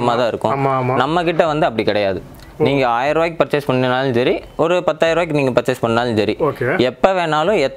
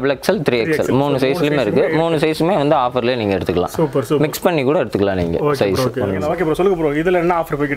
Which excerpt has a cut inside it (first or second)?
second